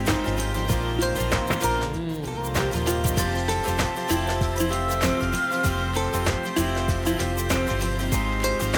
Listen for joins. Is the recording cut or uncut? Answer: uncut